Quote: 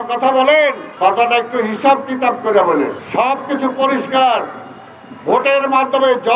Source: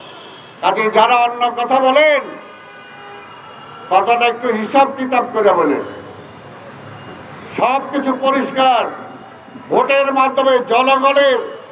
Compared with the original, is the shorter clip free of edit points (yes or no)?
no